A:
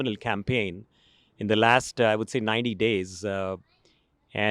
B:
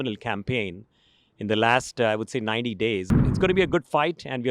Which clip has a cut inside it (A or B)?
B